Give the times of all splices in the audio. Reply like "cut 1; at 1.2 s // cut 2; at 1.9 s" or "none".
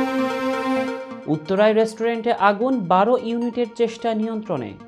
cut 1; at 1.0 s